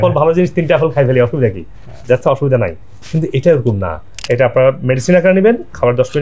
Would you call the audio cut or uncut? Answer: cut